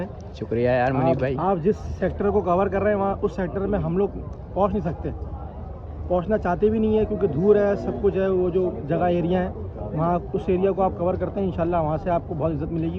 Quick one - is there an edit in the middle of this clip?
no; 0 cuts

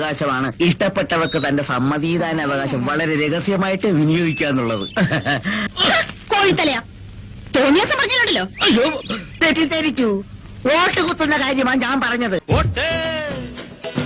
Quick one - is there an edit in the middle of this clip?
no; 0 cuts

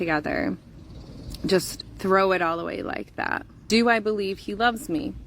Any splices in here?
yes; 1 cut; at 3.6 s

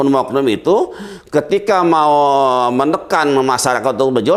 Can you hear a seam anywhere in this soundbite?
no; 0 cuts

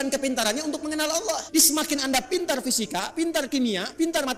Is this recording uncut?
no; 1 cut; at 1.4 s

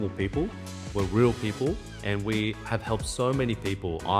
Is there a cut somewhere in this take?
yes; 1 cut; at 1.9 s

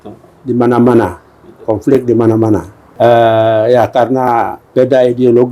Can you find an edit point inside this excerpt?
yes; 1 cut; at 2.8 s

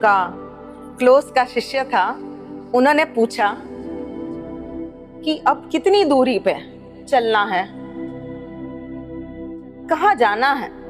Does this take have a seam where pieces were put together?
no; 0 cuts

